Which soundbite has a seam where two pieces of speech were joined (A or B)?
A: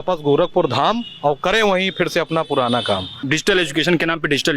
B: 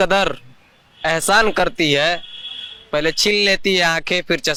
A